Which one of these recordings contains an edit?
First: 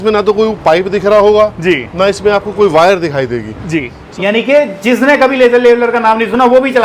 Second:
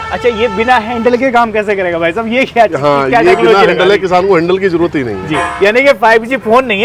first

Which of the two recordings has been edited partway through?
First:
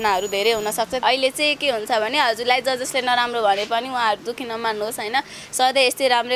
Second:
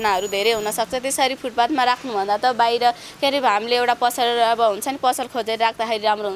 first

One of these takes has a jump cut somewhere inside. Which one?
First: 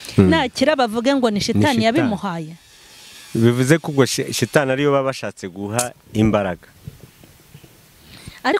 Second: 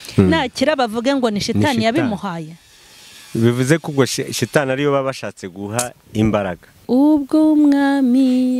second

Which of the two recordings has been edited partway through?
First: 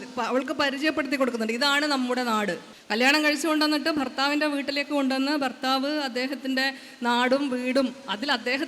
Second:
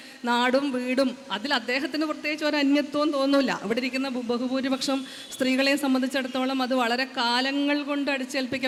first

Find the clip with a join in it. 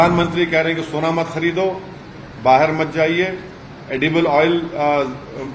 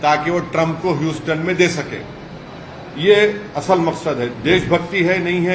second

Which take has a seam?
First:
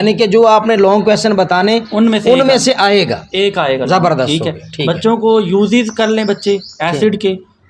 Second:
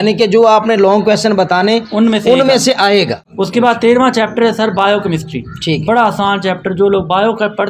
second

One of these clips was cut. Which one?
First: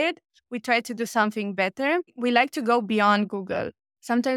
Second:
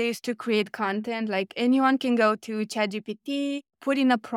first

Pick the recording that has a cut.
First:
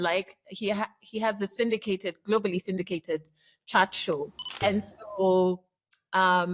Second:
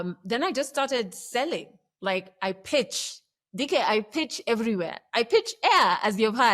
first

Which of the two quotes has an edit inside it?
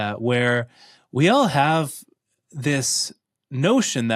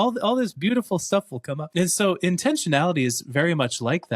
second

